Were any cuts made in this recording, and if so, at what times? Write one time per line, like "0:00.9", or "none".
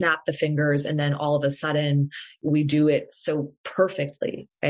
0:02.4